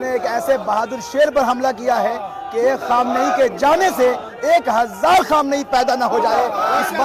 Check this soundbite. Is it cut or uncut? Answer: uncut